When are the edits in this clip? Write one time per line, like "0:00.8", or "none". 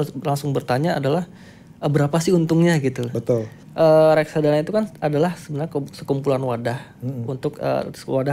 0:03.6